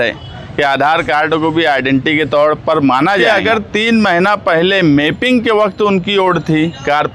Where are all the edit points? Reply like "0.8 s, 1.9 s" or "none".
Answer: 3.2 s